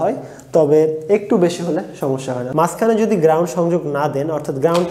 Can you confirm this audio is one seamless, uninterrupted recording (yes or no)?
no